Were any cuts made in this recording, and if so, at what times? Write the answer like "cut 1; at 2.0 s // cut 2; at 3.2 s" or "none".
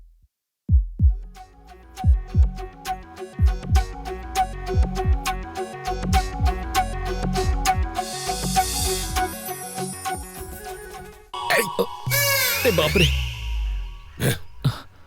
cut 1; at 1.1 s